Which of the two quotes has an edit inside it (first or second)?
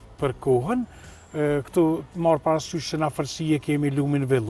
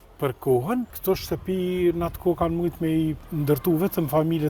second